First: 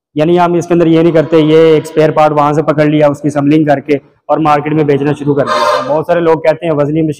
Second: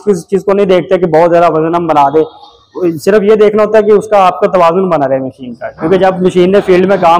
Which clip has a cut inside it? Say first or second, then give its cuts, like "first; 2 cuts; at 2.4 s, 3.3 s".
first; 1 cut; at 5.8 s